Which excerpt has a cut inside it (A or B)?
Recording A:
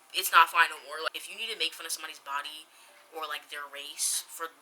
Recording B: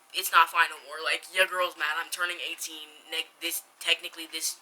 A